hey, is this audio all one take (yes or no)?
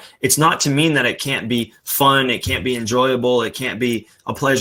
yes